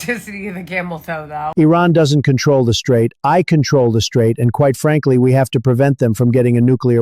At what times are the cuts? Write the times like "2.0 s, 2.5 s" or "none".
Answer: 1.5 s

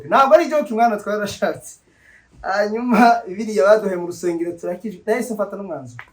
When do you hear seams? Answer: none

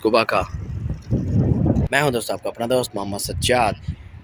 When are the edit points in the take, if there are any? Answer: 1.9 s

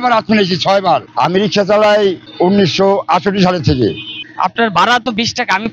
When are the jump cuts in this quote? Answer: none

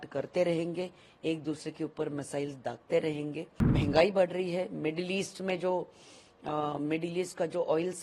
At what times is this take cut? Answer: 3.5 s

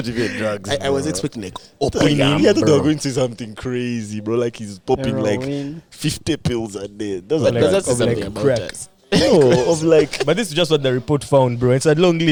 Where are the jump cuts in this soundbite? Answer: none

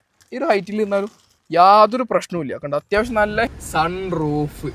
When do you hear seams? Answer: 3.5 s

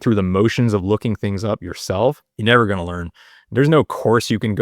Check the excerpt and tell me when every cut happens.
2.3 s

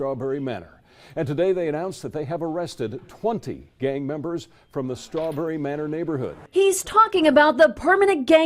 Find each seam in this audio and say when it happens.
6.8 s

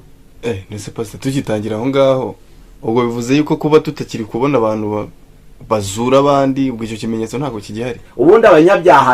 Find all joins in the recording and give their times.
8.0 s

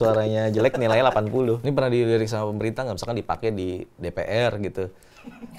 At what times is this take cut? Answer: 1.6 s

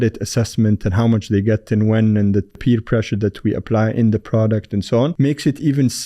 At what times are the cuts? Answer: 2.6 s, 5.1 s

